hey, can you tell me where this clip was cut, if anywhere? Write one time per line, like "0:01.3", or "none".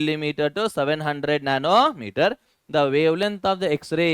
0:02.5